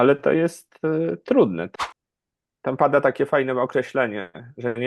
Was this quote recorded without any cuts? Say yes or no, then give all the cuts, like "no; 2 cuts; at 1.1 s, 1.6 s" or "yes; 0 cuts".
no; 1 cut; at 1.7 s